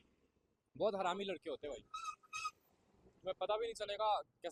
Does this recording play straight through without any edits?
yes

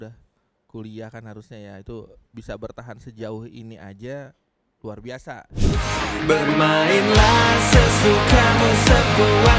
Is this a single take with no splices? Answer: no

